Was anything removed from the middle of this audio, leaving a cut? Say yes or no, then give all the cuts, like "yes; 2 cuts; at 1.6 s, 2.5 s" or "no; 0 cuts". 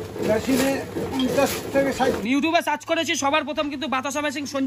yes; 1 cut; at 2.0 s